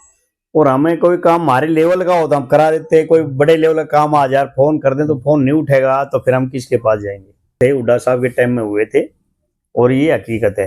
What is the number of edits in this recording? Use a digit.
1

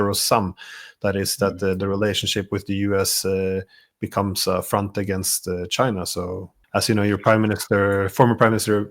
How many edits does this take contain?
1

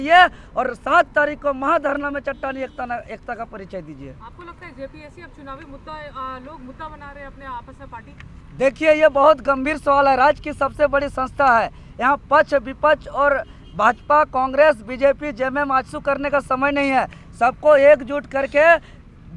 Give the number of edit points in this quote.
0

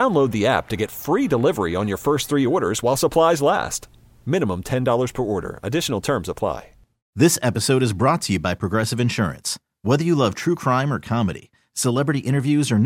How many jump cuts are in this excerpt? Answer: 1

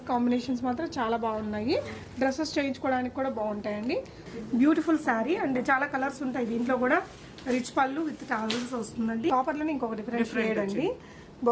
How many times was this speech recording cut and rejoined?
2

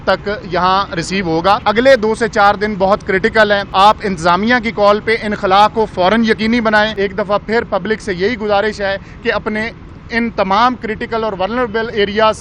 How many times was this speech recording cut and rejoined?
3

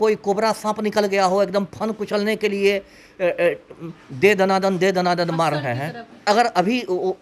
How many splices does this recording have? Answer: 1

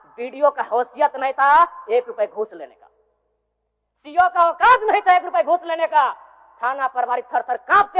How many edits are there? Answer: 0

